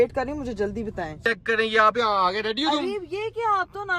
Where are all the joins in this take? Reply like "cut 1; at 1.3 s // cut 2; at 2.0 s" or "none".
cut 1; at 1.2 s